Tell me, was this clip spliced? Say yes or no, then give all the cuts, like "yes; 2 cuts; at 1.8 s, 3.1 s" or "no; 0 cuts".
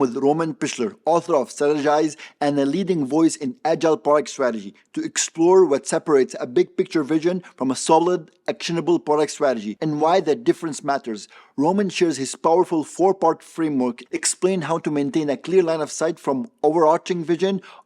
no; 0 cuts